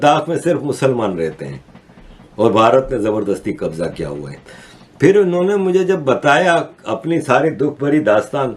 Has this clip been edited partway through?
no; 0 cuts

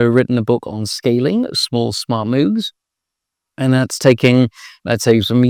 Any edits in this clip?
no; 0 cuts

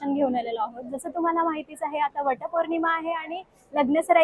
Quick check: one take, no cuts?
yes; 0 cuts

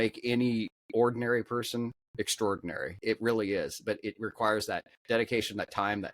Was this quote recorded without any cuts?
no; 1 cut; at 3.0 s

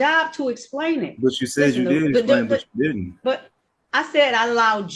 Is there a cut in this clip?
no; 0 cuts

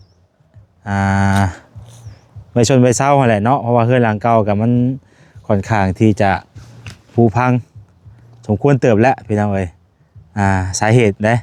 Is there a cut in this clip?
no; 0 cuts

